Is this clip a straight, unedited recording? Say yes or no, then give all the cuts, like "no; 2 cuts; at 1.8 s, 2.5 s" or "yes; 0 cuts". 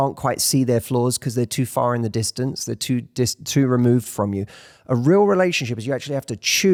yes; 0 cuts